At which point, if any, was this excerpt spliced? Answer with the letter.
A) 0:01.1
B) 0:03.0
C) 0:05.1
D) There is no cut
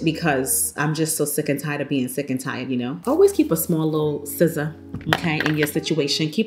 B